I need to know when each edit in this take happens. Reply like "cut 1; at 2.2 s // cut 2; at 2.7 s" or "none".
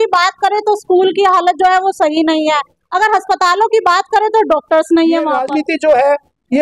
cut 1; at 5.4 s